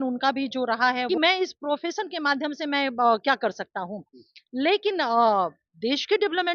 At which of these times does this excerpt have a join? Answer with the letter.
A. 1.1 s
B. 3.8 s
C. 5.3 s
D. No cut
A